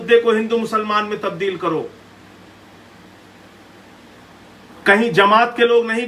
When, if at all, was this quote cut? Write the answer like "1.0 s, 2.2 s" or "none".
none